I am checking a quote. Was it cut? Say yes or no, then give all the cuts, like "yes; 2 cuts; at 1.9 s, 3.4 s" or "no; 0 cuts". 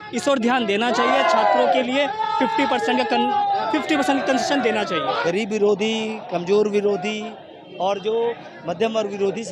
yes; 1 cut; at 5.1 s